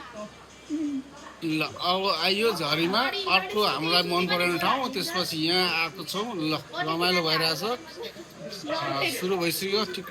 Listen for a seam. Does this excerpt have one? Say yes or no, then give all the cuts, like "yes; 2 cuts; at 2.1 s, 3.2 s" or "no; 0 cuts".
no; 0 cuts